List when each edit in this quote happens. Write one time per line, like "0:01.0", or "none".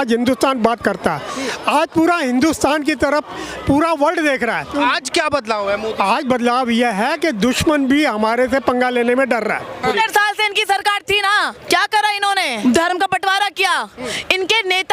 0:04.7
0:09.9
0:11.6
0:12.5